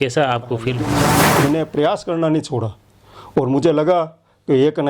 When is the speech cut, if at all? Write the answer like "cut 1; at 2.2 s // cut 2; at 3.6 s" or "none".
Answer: cut 1; at 1.2 s